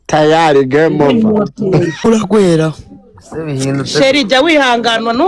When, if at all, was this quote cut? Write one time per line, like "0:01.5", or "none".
0:02.0